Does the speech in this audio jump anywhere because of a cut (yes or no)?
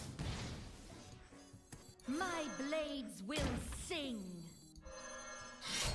yes